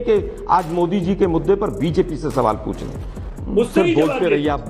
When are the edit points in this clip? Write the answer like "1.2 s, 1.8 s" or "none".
3.1 s